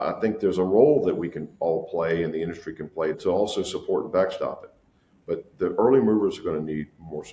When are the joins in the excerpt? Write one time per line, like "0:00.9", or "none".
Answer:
0:03.1